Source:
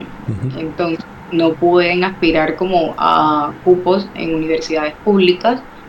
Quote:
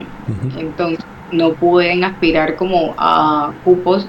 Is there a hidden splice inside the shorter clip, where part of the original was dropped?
no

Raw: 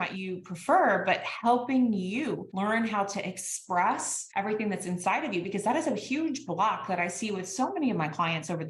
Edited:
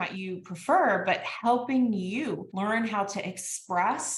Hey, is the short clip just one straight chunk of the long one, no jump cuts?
yes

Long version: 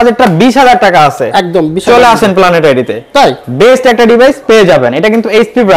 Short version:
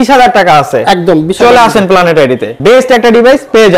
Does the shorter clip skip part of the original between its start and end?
yes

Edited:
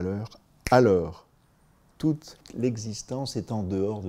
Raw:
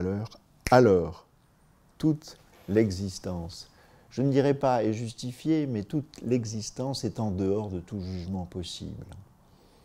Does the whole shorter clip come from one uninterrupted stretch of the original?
no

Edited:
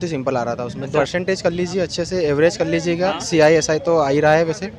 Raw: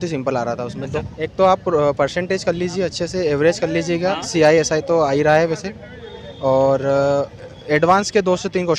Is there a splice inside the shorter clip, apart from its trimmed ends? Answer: yes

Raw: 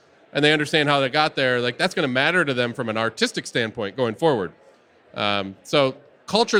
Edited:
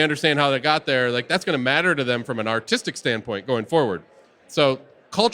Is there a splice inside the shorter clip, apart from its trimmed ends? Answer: yes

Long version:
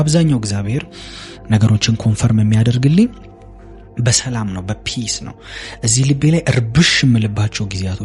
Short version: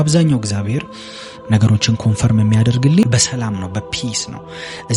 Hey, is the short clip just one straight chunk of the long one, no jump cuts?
no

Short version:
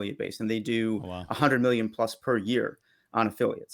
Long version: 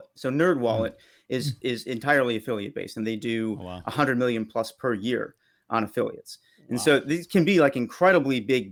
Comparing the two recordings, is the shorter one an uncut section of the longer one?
yes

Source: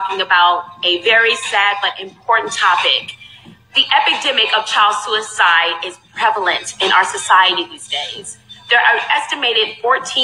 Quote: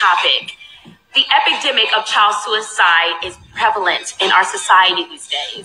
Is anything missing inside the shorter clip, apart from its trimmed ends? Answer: no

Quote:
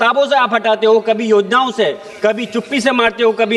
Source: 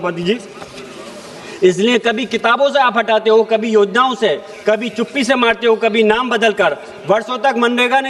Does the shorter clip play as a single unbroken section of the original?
yes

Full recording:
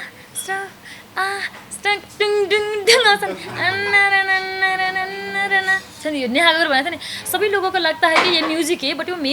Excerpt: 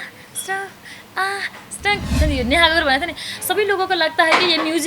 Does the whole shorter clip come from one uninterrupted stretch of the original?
no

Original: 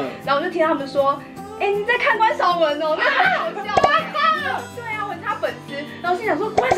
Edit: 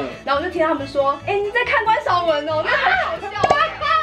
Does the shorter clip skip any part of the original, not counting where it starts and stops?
yes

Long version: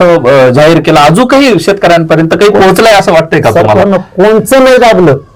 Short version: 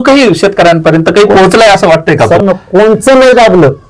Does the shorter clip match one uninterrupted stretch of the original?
no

